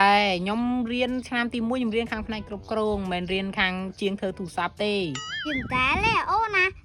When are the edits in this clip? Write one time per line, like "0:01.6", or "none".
0:05.3